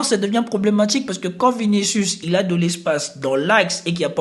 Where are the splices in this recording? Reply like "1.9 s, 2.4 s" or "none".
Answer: none